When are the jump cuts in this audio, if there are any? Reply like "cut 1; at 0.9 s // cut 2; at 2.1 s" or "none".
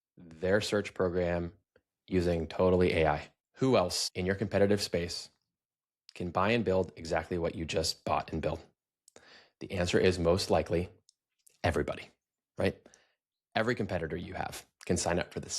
cut 1; at 3.4 s // cut 2; at 4.0 s